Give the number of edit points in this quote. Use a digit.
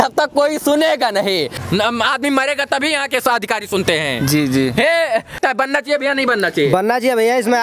2